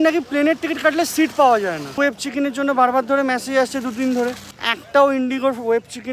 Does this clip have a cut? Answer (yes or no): no